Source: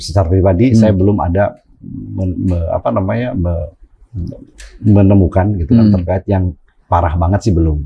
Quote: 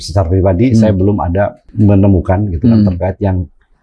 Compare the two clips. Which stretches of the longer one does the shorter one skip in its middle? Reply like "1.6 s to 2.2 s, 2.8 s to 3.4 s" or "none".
1.6 s to 4.7 s